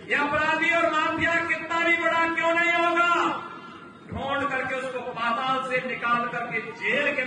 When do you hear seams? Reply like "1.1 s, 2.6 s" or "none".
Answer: none